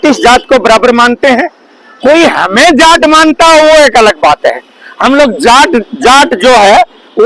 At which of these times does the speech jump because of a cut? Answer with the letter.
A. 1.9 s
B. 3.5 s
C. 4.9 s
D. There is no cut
D